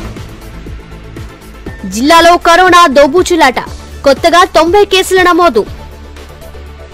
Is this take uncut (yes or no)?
yes